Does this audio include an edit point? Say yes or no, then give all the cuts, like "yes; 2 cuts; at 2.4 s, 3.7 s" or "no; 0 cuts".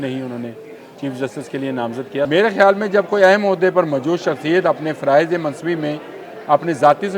yes; 1 cut; at 2.3 s